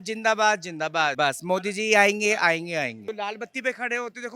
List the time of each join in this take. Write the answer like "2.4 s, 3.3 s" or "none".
1.1 s, 3.0 s